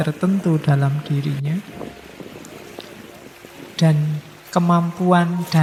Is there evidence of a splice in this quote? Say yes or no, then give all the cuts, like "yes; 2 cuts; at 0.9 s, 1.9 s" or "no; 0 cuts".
no; 0 cuts